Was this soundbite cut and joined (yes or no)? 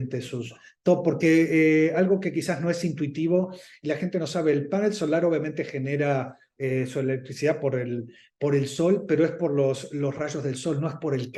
no